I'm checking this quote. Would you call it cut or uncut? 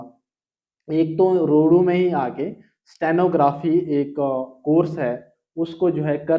uncut